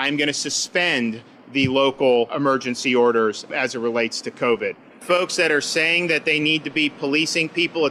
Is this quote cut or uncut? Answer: cut